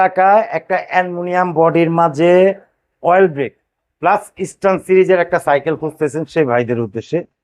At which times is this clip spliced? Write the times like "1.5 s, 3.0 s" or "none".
none